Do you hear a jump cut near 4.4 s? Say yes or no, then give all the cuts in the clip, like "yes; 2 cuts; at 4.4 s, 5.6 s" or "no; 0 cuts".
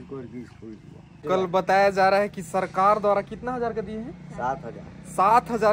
no; 1 cut; at 1.2 s